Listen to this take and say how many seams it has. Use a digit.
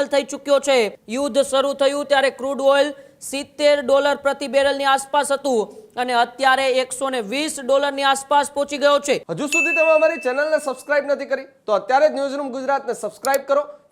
2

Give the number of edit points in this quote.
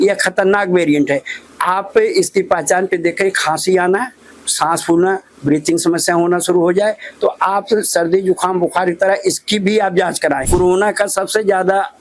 1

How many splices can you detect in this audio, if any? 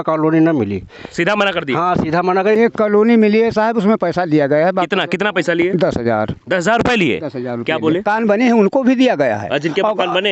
2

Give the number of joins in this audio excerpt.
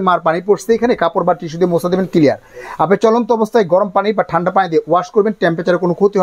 0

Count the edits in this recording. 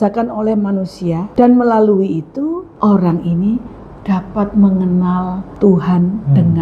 3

